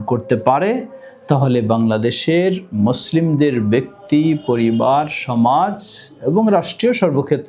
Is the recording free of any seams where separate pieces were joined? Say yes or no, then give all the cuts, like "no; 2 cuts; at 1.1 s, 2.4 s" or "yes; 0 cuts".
yes; 0 cuts